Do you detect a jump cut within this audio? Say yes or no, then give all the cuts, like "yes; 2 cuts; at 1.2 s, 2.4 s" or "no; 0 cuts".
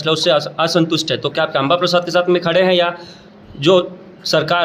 no; 0 cuts